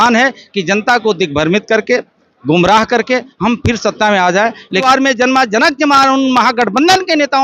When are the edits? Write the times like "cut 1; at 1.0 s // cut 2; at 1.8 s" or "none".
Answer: cut 1; at 4.8 s